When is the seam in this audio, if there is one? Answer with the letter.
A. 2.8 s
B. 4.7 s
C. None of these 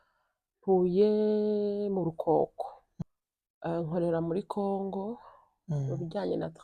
A